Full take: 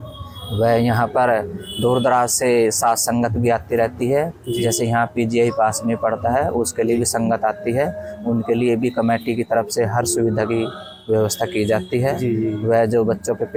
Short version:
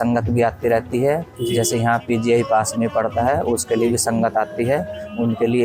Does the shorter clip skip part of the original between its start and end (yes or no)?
no